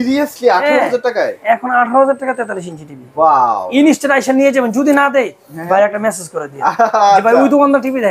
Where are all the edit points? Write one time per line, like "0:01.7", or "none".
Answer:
none